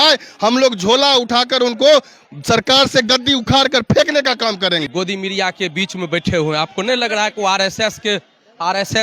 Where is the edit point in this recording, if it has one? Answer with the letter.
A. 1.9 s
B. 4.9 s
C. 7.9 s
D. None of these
B